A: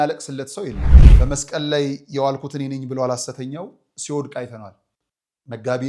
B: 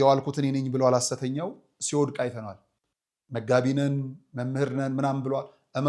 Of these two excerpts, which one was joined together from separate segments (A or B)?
A